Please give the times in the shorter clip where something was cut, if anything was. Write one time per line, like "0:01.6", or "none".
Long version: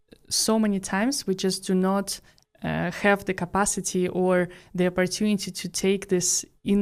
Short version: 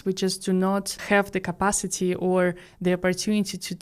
0:01.0